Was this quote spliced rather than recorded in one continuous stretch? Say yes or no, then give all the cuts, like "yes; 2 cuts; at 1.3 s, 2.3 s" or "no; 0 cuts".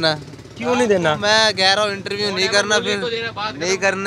no; 0 cuts